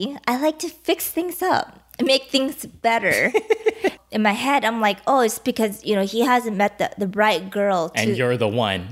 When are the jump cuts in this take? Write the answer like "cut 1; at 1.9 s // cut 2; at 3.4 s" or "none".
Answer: cut 1; at 4.0 s